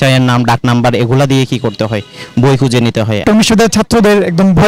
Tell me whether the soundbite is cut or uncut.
cut